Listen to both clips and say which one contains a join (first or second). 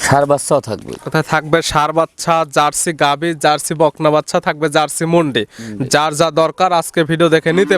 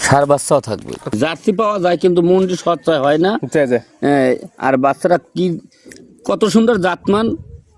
second